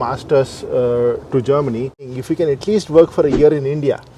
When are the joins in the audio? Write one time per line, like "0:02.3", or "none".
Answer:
0:02.1